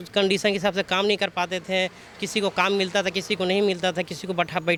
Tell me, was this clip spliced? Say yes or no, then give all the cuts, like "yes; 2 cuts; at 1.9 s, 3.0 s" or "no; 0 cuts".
no; 0 cuts